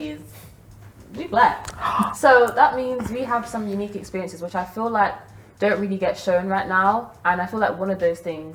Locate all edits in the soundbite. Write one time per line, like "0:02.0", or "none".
none